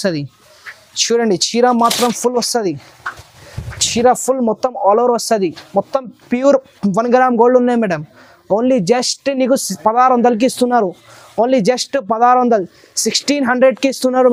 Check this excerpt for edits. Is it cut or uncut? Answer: uncut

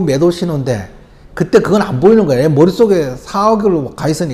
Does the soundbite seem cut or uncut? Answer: uncut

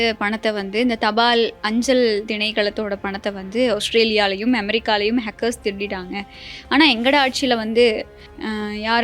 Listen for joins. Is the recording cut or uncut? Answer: uncut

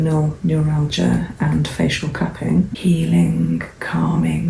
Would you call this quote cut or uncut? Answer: cut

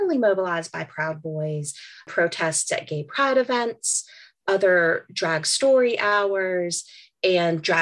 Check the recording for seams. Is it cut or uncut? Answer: uncut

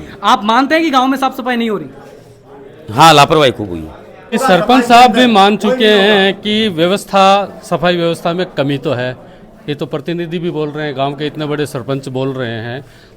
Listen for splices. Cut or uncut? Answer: cut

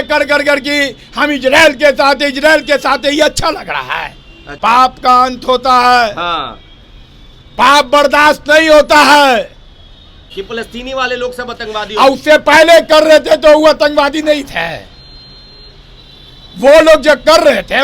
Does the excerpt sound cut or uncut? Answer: cut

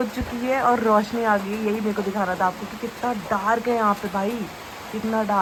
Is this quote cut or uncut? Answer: uncut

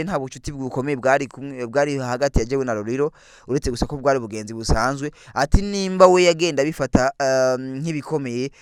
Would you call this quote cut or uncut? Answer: uncut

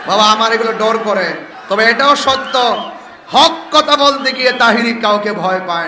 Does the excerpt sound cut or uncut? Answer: cut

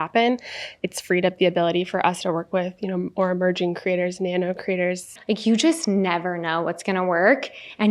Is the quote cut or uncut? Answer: cut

